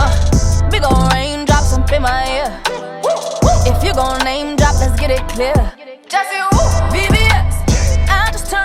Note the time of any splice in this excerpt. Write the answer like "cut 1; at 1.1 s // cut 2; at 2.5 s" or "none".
none